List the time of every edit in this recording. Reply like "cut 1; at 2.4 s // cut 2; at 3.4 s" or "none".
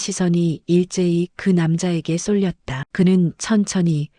cut 1; at 2.8 s

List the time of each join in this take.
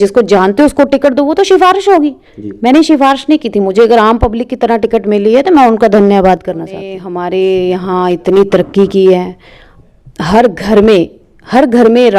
cut 1; at 7.0 s

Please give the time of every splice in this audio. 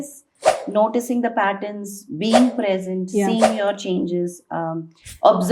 none

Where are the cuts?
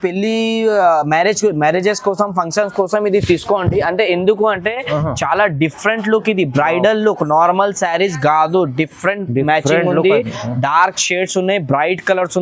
none

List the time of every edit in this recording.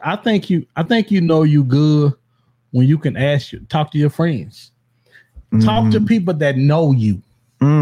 none

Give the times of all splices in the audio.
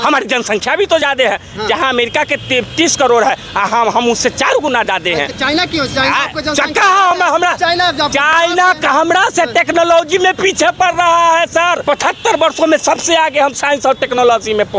cut 1; at 11.8 s

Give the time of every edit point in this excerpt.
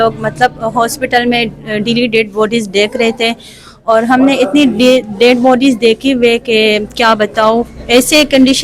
none

